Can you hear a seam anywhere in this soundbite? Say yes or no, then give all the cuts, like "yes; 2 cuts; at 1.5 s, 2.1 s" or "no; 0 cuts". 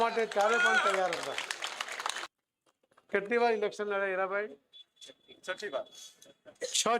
yes; 1 cut; at 2.2 s